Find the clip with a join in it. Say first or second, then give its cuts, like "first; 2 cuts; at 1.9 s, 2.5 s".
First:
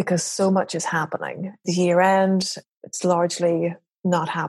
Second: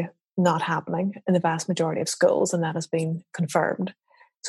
first; 2 cuts; at 1.6 s, 2.6 s